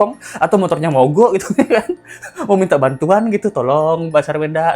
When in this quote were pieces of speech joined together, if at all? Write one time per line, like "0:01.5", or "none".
none